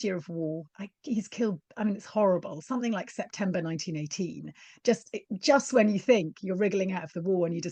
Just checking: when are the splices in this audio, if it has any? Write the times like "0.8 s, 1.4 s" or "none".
none